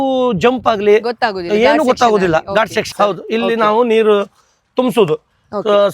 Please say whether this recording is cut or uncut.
cut